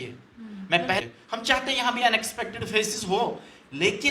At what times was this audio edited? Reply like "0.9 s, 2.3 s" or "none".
1.0 s